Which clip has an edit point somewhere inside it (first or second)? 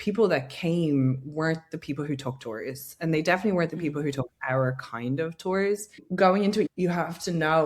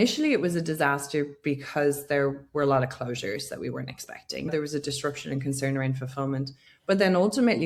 first